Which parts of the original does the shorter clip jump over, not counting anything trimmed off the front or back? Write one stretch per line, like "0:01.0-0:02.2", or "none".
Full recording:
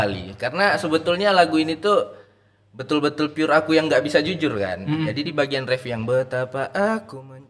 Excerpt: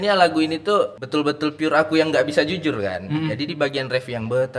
0:02.2-0:02.8